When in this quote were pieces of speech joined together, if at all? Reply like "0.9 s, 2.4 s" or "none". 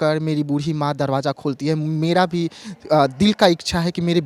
none